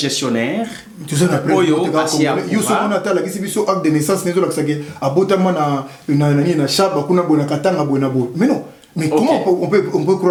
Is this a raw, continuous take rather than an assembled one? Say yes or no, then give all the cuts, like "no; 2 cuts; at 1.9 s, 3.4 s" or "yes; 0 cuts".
yes; 0 cuts